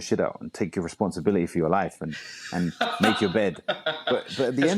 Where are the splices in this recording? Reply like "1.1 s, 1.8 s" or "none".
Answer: none